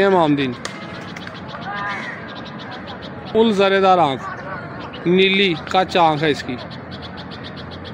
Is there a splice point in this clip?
no; 0 cuts

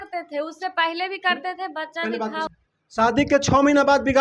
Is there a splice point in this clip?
yes; 1 cut; at 2.5 s

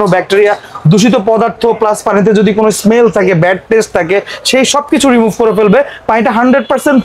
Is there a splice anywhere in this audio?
no; 0 cuts

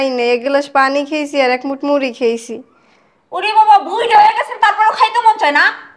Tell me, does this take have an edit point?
no; 0 cuts

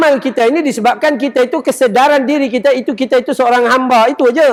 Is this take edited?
no; 0 cuts

